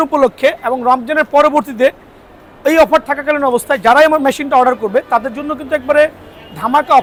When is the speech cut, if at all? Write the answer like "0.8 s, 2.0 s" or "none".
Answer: none